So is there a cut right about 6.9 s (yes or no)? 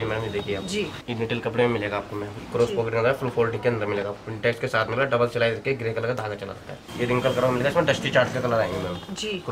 yes